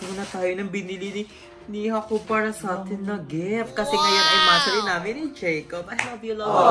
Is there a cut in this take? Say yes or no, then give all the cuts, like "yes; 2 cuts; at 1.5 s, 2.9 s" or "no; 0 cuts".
no; 0 cuts